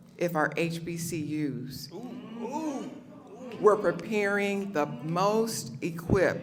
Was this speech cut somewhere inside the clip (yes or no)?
no